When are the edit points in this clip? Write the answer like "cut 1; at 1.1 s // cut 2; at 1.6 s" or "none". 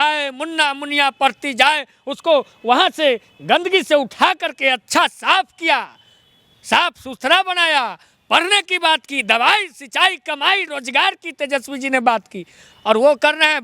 none